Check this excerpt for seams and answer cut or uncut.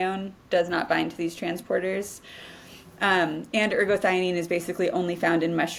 uncut